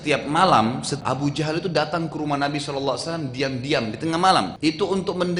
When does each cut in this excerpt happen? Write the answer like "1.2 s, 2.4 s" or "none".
1.0 s, 4.5 s

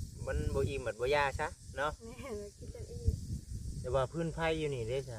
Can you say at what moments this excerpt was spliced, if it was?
3.9 s

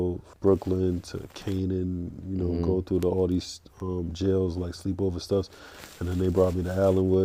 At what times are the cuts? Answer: none

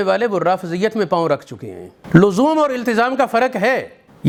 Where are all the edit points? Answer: none

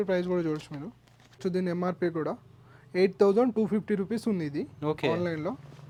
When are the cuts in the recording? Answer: none

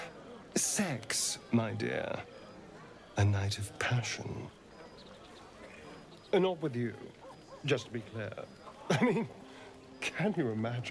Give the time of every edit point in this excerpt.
6.0 s, 8.5 s

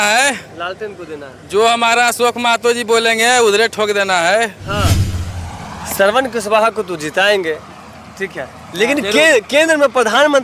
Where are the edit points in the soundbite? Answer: 5.0 s

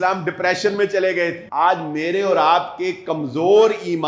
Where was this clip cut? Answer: 1.4 s

